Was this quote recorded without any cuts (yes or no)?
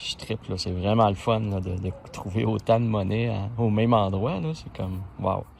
yes